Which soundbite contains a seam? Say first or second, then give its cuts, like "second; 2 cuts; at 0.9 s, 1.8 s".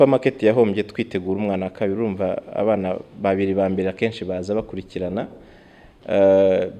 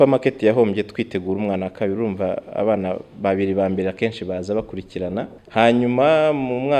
second; 1 cut; at 5.4 s